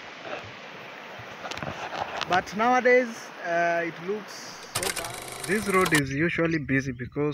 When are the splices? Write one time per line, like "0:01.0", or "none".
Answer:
0:05.0

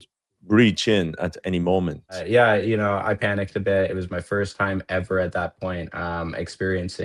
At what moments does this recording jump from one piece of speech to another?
0:02.2

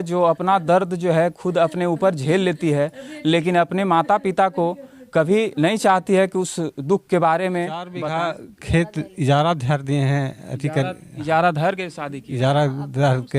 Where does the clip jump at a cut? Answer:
0:07.9

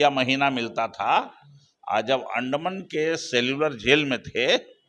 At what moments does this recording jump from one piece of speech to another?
none

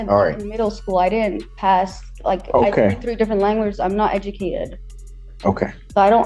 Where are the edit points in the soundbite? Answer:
none

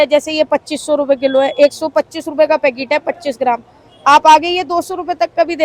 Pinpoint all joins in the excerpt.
none

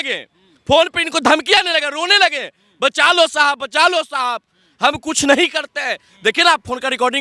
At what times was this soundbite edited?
none

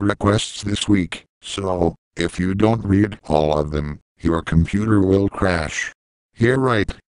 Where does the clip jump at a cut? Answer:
0:01.4

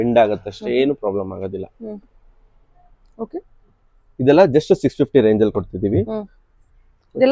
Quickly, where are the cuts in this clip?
none

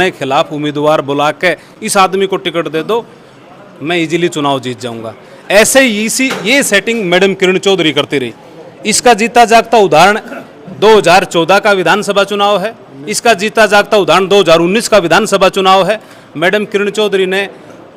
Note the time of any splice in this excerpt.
none

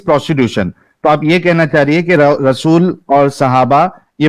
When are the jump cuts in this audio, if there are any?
none

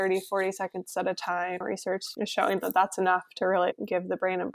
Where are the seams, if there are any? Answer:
0:01.6
0:03.7

